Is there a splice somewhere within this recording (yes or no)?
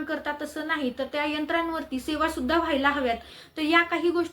yes